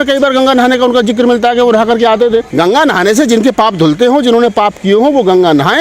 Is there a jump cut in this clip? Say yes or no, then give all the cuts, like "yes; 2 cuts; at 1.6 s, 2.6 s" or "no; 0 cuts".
yes; 1 cut; at 2.5 s